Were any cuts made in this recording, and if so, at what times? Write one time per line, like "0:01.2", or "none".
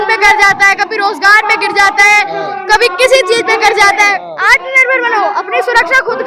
0:04.3